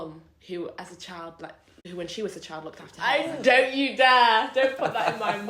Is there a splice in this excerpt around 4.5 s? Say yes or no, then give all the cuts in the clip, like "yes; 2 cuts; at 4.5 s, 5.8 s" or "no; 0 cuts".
no; 2 cuts; at 1.7 s, 2.9 s